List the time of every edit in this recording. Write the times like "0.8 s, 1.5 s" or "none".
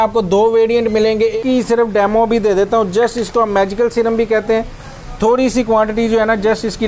1.4 s